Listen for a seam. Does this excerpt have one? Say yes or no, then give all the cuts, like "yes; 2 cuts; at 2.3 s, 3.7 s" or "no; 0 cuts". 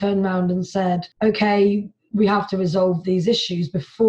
yes; 1 cut; at 1.1 s